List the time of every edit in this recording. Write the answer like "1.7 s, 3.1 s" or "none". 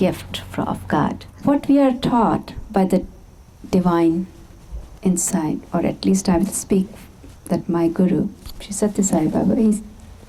1.3 s